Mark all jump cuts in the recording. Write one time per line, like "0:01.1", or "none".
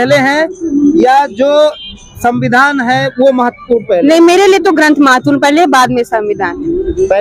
none